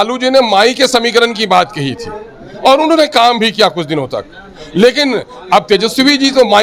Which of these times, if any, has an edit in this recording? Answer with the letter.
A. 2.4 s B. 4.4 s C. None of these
C